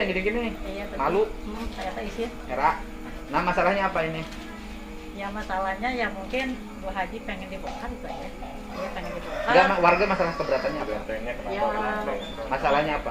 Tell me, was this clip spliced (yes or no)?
no